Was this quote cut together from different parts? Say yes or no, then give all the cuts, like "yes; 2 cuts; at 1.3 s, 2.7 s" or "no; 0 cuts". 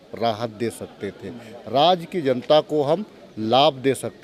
no; 0 cuts